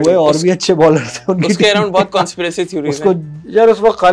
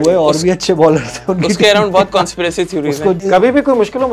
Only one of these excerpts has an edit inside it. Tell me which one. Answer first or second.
second